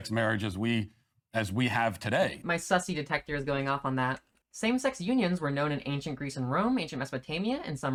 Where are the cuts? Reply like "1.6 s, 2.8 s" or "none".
none